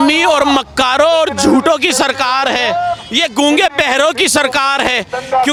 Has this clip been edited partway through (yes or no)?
no